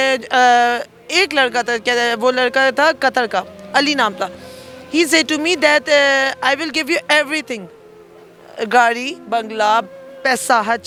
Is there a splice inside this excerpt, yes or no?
no